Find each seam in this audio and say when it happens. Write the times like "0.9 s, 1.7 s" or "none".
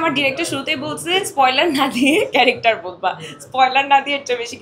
none